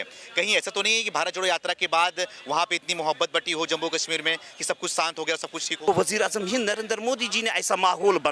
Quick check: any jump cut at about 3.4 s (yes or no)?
no